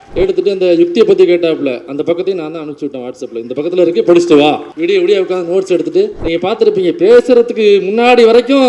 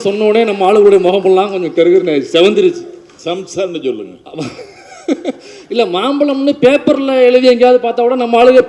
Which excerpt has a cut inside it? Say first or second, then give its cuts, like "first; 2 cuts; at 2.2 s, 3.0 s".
first; 2 cuts; at 4.7 s, 6.2 s